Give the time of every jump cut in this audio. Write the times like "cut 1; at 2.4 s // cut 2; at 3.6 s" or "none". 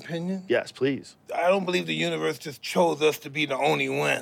cut 1; at 1.2 s